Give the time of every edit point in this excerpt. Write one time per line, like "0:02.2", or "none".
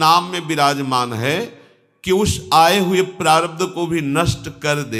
none